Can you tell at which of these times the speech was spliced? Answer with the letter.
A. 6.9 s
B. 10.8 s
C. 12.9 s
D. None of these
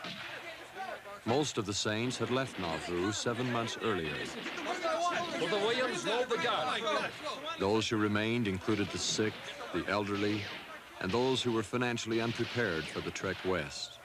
B